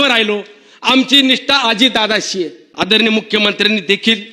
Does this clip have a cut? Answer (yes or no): yes